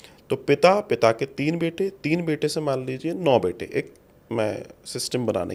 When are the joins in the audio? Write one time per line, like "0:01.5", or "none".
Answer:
none